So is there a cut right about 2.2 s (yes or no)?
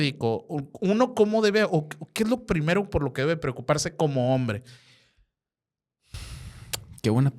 no